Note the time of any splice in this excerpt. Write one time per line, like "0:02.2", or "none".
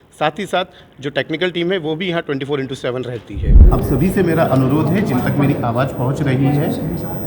0:03.6